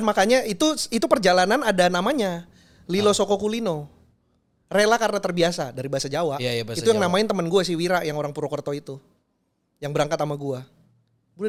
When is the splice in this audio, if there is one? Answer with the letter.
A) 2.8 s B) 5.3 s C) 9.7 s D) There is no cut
D